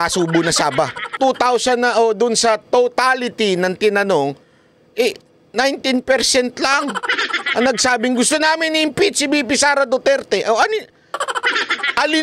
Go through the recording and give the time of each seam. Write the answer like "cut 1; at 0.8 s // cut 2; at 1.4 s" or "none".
cut 1; at 1.2 s